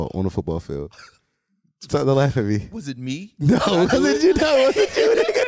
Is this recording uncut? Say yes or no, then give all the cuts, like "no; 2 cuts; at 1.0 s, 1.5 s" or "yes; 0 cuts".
yes; 0 cuts